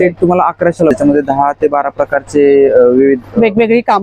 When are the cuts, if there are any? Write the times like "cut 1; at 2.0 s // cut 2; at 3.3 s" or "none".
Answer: cut 1; at 0.9 s